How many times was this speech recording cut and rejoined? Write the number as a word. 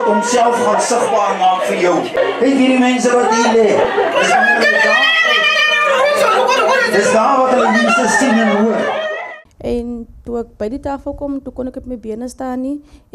two